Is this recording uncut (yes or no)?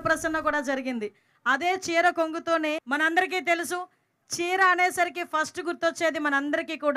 no